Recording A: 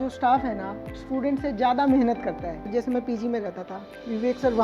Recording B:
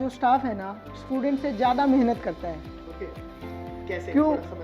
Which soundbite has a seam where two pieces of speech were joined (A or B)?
A